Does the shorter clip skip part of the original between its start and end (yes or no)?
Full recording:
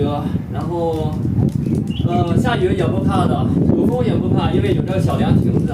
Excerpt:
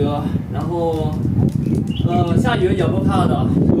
no